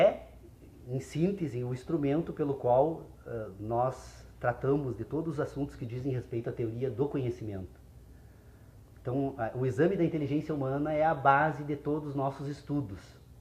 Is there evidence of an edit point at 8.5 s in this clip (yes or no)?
no